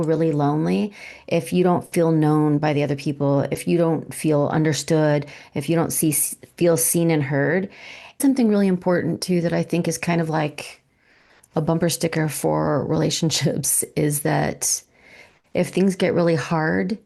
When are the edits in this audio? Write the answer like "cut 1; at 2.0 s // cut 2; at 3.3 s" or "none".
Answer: cut 1; at 8.2 s